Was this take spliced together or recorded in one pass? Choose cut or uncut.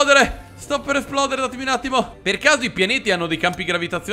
cut